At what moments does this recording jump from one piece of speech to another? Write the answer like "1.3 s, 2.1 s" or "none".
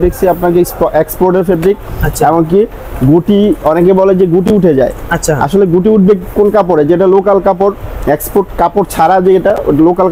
none